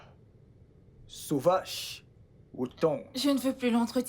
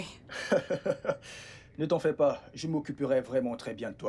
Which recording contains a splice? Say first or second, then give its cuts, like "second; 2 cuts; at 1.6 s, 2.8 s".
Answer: first; 1 cut; at 3.1 s